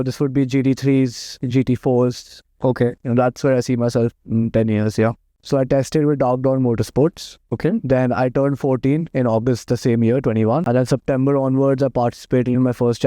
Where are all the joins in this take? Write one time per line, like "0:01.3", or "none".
0:05.3
0:10.7